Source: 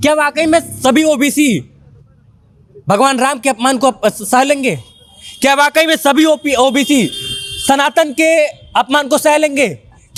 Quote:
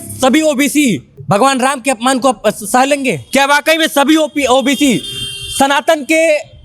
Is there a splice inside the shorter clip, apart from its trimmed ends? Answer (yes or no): yes